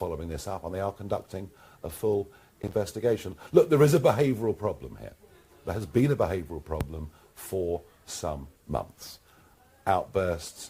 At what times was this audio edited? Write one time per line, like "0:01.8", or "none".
none